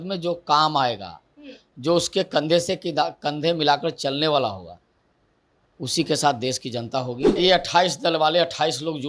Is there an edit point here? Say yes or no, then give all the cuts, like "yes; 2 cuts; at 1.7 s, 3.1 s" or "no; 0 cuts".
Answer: yes; 1 cut; at 7.3 s